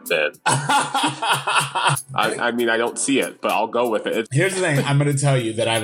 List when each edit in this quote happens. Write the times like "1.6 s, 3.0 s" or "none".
2.0 s, 4.3 s